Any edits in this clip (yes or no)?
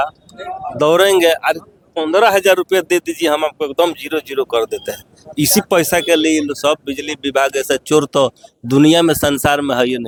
no